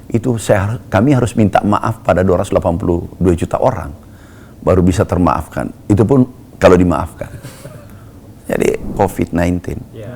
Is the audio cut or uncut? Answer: cut